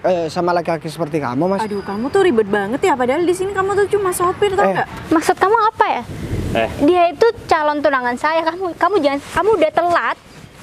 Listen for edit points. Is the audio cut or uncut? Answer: cut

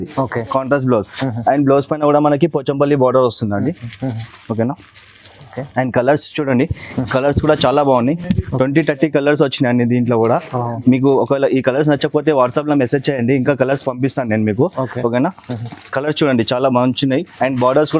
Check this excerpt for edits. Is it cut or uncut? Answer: uncut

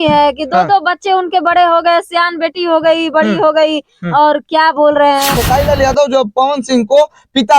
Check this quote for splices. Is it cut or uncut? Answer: cut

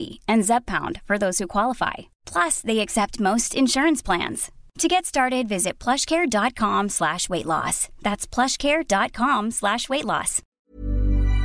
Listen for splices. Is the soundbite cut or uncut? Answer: cut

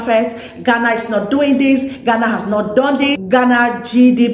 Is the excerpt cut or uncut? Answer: cut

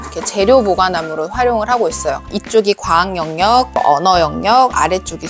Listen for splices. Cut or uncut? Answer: cut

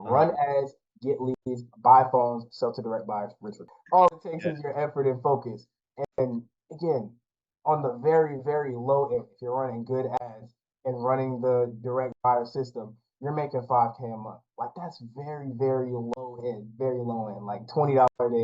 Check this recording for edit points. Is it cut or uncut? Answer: cut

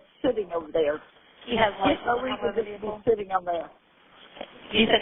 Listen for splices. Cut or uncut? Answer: uncut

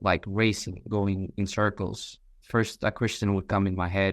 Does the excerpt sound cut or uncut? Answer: cut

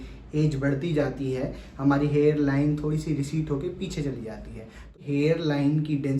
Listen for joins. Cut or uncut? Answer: cut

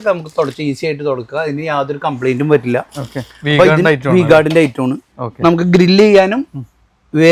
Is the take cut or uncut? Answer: uncut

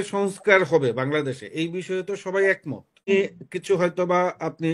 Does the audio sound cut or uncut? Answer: cut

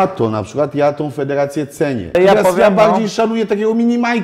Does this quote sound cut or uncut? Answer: cut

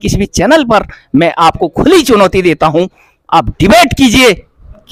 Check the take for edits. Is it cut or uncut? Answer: uncut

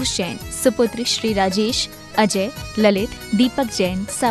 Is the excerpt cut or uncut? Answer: uncut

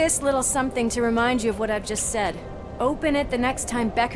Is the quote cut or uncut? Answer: uncut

